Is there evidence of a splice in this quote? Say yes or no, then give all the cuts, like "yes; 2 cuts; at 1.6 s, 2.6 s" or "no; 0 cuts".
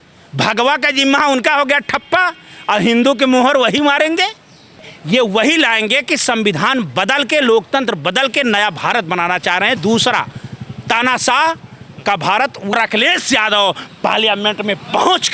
yes; 2 cuts; at 4.9 s, 12.7 s